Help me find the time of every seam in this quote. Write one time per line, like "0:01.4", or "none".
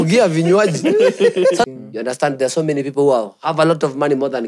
0:01.7